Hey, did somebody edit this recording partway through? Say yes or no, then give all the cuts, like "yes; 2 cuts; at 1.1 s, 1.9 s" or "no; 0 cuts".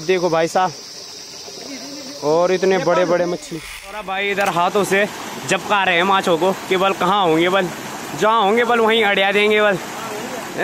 yes; 1 cut; at 4.0 s